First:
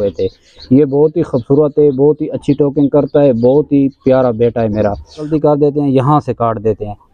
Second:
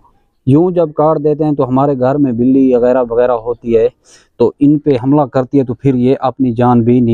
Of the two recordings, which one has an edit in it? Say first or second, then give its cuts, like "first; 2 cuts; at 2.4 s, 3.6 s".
first; 1 cut; at 5.3 s